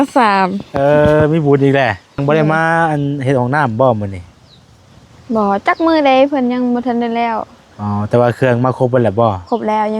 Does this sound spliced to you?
yes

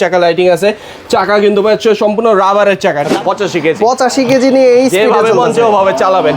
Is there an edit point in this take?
yes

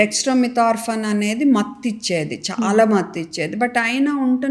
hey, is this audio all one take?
yes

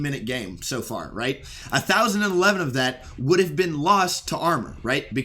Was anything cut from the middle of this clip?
yes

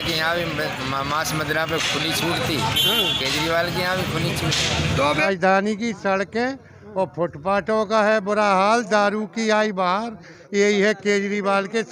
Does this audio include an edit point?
yes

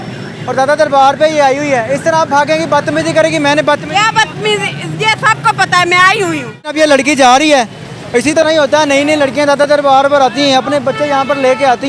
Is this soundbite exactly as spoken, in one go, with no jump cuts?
no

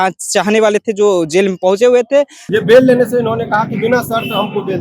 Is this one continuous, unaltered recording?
no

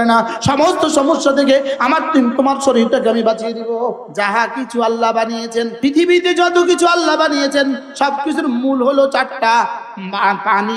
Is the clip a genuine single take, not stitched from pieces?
no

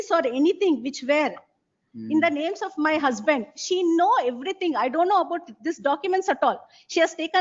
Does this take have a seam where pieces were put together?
no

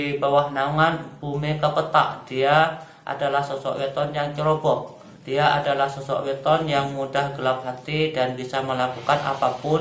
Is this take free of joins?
yes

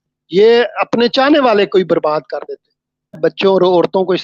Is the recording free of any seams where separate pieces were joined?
no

